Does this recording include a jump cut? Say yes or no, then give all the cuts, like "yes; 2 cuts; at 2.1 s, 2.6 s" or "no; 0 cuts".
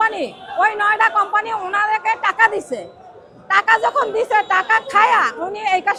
no; 0 cuts